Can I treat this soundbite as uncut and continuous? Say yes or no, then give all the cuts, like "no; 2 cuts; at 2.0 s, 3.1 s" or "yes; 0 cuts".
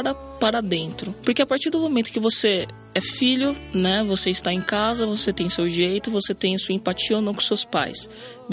no; 1 cut; at 1.1 s